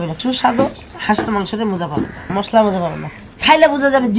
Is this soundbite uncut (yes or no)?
yes